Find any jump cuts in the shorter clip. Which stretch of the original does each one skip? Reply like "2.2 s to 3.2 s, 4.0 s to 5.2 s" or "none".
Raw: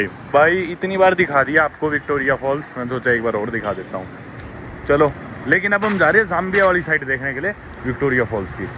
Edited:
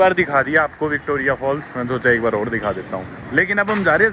4.2 s to 5.3 s

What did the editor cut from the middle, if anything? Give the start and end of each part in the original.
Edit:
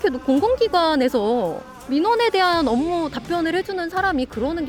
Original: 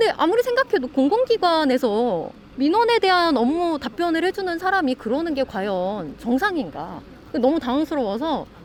none

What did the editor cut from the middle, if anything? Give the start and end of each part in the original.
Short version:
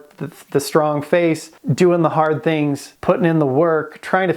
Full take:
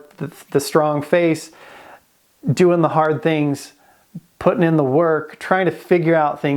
1.6 s to 2.3 s, 3.7 s to 4.3 s

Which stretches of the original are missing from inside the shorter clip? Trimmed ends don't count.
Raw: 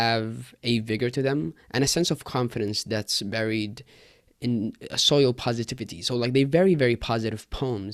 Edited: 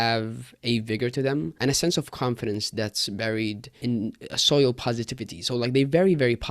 1.5 s to 1.7 s, 3.8 s to 4.3 s

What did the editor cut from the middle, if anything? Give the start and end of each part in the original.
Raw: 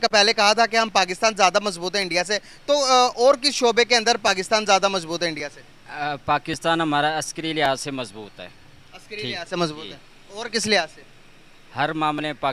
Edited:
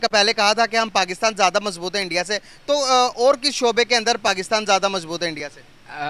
none

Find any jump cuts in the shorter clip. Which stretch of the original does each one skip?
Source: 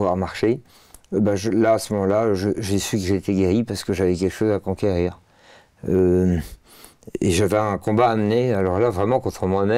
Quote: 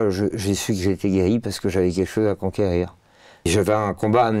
5.7 s to 7.3 s

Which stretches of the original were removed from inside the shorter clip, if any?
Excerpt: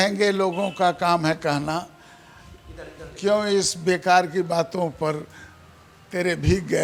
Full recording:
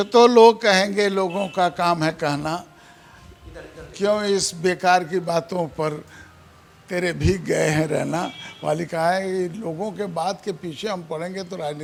none

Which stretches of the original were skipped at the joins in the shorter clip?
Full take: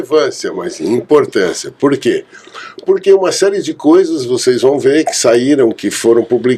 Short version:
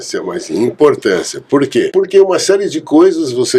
2.2 s to 2.8 s

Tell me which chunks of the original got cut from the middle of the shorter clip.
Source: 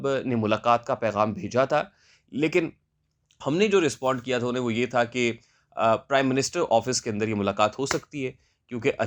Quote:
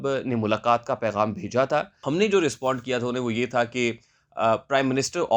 1.9 s to 3.3 s

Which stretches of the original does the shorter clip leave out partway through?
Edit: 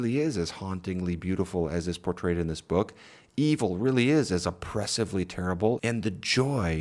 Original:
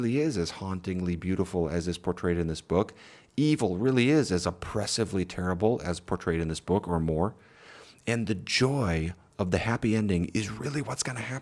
5.8 s to 8.0 s

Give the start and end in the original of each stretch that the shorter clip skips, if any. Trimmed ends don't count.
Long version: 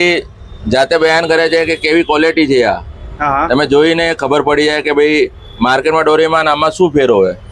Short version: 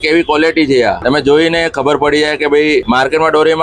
2.8 s to 3.5 s, 5.3 s to 5.6 s

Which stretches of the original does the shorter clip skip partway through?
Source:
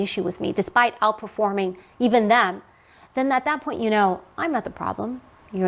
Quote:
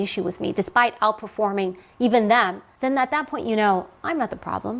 2.6 s to 3.0 s

